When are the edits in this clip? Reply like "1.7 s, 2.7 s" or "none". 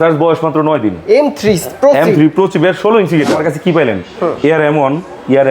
3.3 s